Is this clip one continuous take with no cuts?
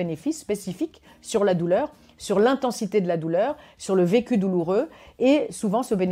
yes; 0 cuts

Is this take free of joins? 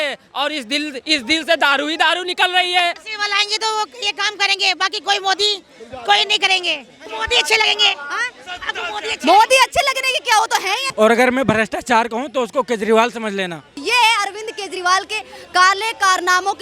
no; 4 cuts; at 3.1 s, 7.1 s, 10.8 s, 13.8 s

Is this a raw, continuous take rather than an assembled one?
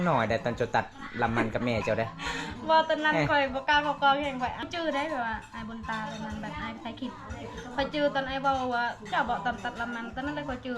no; 1 cut; at 4.6 s

